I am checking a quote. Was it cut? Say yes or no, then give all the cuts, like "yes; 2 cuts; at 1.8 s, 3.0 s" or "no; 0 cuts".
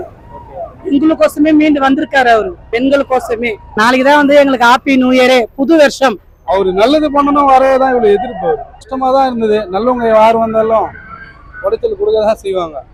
no; 0 cuts